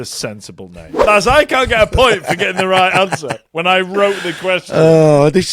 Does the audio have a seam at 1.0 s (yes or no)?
yes